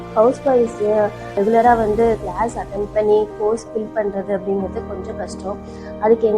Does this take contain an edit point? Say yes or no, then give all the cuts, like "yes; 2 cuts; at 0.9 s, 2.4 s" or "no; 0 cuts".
yes; 1 cut; at 1.3 s